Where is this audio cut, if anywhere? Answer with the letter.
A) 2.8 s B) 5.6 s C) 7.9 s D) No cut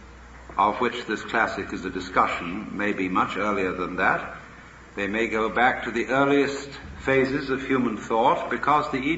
A